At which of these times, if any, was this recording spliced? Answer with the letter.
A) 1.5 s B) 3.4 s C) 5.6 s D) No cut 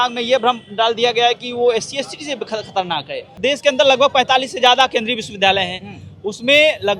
B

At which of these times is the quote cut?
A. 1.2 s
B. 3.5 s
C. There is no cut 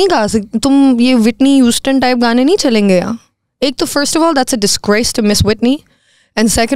C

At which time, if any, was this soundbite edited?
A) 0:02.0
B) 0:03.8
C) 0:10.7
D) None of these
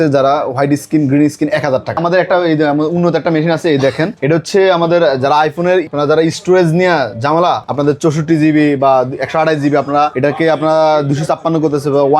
A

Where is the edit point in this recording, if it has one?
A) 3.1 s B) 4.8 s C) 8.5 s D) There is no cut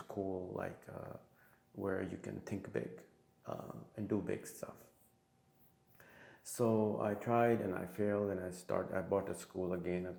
D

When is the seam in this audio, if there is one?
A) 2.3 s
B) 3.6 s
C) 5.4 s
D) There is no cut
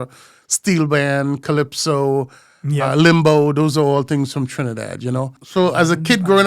C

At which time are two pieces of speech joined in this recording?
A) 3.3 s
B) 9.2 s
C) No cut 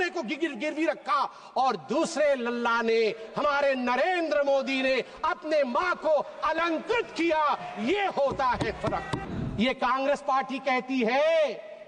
B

